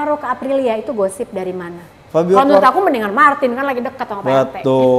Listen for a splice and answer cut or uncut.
uncut